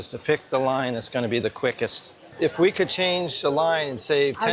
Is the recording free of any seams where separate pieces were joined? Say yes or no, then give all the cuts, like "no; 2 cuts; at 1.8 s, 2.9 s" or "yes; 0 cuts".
no; 1 cut; at 2.3 s